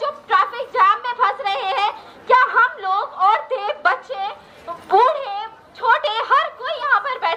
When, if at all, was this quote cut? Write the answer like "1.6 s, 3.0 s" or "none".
none